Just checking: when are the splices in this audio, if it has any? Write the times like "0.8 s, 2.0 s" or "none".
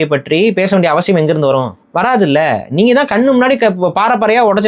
1.8 s